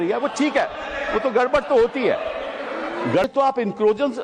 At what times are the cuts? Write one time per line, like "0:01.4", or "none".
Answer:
0:03.2